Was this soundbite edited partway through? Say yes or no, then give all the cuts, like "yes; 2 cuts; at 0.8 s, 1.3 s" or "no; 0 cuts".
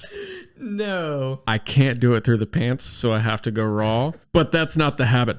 yes; 2 cuts; at 1.4 s, 4.2 s